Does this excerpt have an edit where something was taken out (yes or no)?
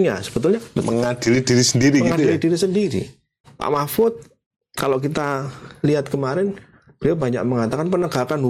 yes